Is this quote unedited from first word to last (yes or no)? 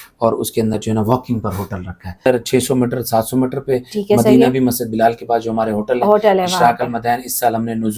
no